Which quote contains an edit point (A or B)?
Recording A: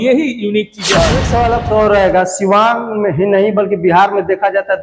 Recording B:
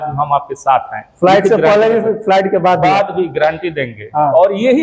A